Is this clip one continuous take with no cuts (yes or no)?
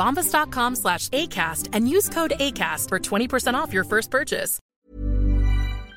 no